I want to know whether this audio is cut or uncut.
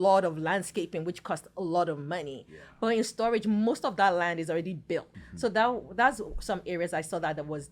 cut